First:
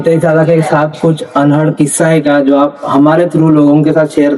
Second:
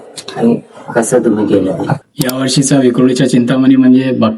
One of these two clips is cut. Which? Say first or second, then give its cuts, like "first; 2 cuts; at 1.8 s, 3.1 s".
second; 1 cut; at 1.9 s